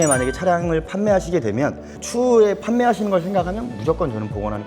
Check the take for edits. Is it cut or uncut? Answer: cut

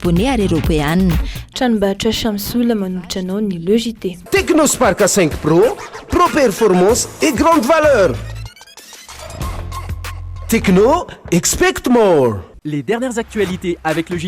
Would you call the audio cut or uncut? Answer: cut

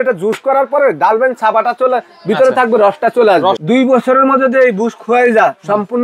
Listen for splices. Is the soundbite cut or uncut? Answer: cut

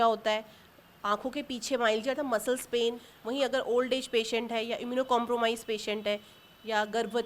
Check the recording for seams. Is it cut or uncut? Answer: cut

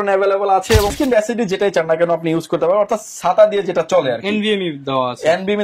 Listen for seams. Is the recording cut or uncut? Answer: cut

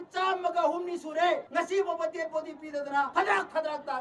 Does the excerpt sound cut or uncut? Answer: cut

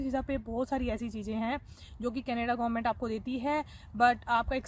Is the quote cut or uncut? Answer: uncut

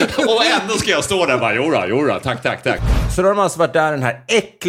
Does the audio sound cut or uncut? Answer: cut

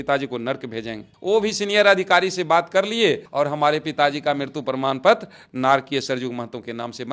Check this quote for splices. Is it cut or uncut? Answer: uncut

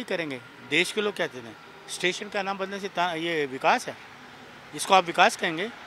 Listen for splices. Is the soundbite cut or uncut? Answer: uncut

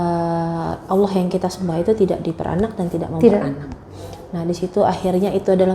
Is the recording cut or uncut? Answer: uncut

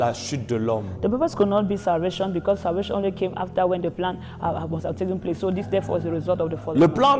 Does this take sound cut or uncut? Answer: uncut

